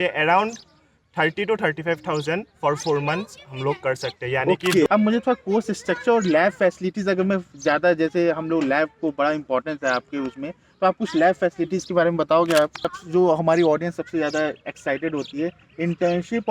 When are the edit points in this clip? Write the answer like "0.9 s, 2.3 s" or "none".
4.9 s, 12.9 s